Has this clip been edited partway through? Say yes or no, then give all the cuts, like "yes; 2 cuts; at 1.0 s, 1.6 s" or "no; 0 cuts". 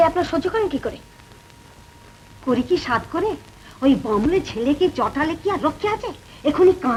no; 0 cuts